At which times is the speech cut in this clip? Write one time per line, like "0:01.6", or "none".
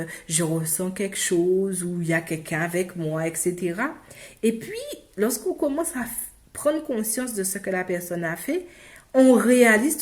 none